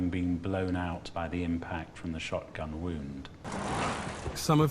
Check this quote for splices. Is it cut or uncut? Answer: cut